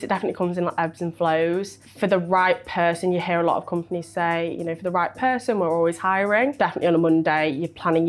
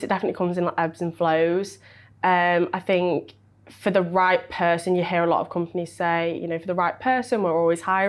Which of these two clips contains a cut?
first; 2 cuts; at 1.8 s, 6.6 s

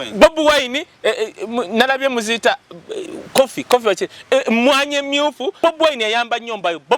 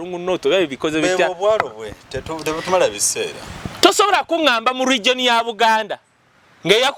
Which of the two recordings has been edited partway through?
first; 1 cut; at 5.5 s

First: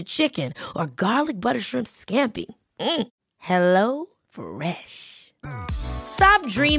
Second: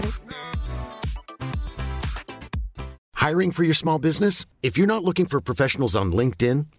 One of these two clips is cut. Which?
second; 1 cut; at 3.0 s

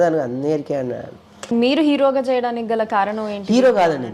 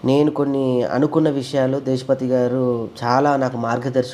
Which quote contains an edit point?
first; 1 cut; at 1.5 s

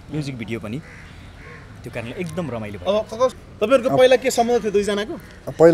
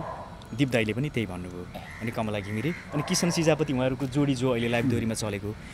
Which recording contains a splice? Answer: first; 1 cut; at 3.4 s

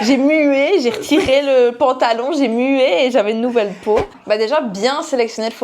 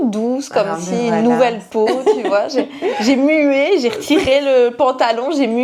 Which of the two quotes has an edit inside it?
first; 1 cut; at 4.1 s

